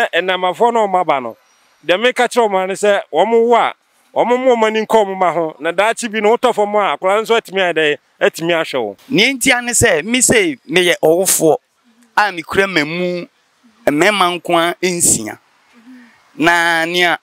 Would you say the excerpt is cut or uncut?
cut